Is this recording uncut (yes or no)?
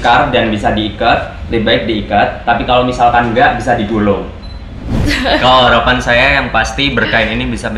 no